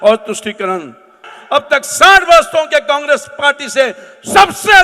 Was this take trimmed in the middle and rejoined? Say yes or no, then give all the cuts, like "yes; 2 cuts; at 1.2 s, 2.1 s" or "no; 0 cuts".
yes; 1 cut; at 1.3 s